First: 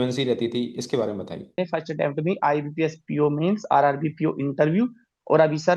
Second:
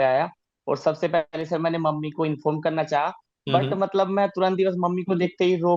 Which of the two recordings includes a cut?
first; 1 cut; at 1.6 s

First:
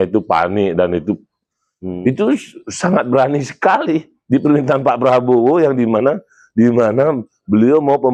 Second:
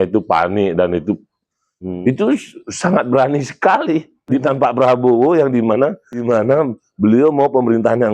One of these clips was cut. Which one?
second; 2 cuts; at 4.3 s, 6.3 s

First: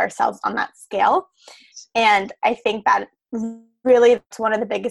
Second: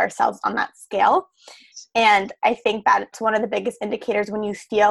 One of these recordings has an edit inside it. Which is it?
second; 1 cut; at 3.2 s

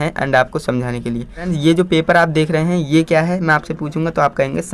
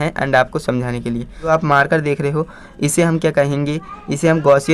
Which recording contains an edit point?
second; 1 cut; at 1.5 s

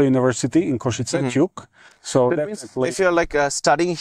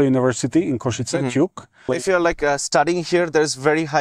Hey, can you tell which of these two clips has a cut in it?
second; 1 cut; at 1.7 s

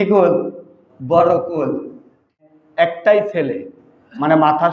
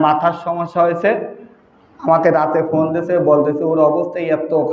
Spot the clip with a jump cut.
first; 1 cut; at 2.5 s

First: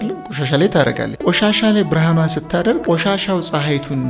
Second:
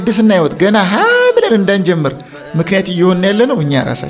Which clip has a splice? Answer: first; 2 cuts; at 1.1 s, 2.8 s

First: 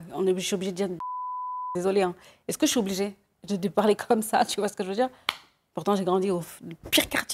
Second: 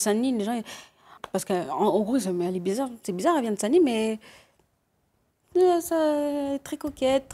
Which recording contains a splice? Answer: second; 1 cut; at 1.1 s

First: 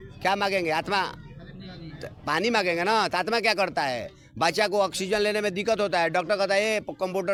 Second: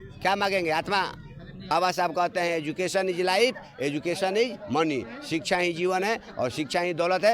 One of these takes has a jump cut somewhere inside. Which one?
second; 1 cut; at 1.7 s

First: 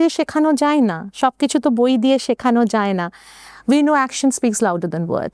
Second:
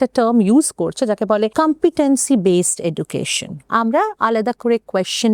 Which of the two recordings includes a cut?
second; 2 cuts; at 1.5 s, 3.7 s

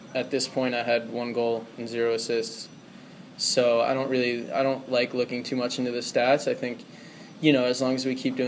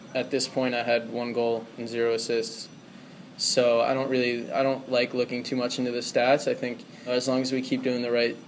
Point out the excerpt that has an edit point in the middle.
second; 1 cut; at 7.1 s

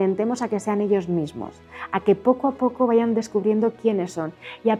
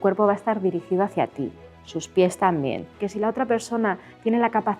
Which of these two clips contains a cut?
second; 1 cut; at 3.0 s

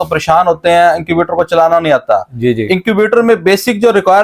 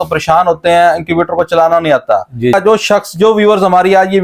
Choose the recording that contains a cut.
second; 1 cut; at 2.5 s

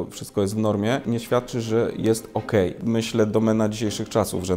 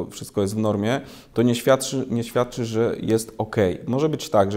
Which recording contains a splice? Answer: first; 2 cuts; at 1.1 s, 2.8 s

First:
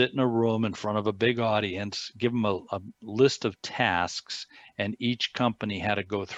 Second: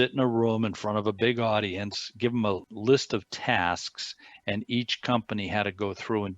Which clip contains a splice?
second; 1 cut; at 2.7 s

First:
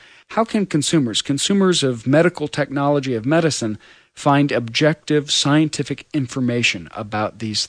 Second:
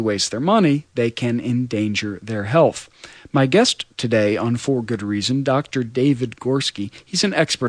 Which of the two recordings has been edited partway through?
first; 1 cut; at 2.6 s

